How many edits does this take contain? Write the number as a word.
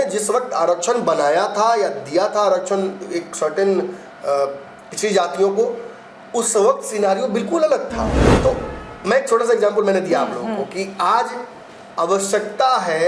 one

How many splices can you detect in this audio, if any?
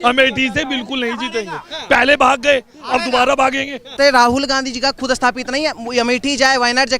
one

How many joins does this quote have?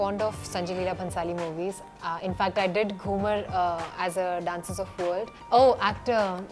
one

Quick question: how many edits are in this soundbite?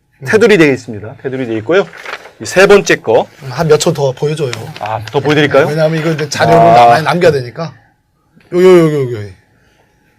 one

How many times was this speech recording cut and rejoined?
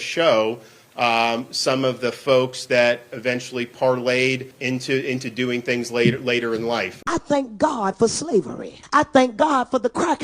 three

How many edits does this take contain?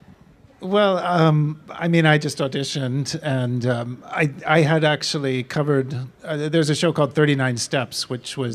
one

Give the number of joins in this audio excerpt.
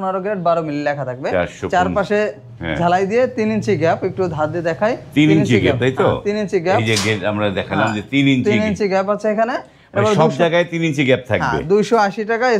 zero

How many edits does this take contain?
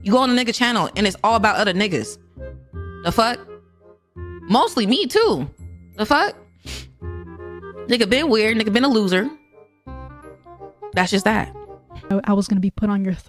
one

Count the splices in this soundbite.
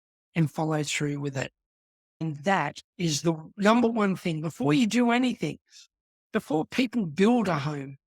one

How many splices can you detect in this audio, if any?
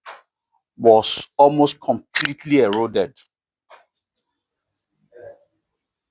zero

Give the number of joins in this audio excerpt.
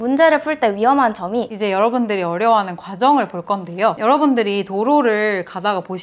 two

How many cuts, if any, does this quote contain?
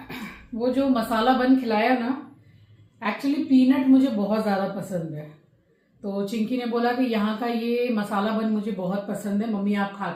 zero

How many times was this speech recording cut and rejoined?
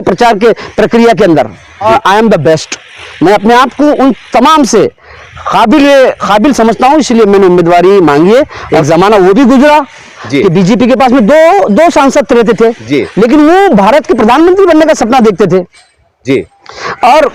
two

